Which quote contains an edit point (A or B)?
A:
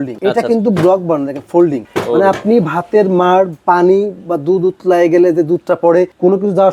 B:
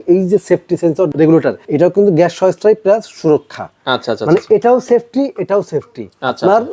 B